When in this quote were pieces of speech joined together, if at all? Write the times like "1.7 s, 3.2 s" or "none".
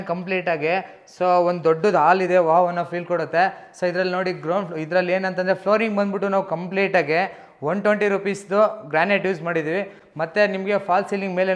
none

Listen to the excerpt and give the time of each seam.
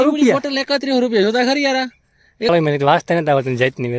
2.5 s

